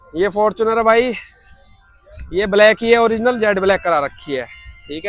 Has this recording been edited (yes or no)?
no